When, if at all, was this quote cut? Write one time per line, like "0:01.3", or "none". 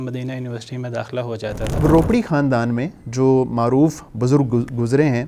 0:01.7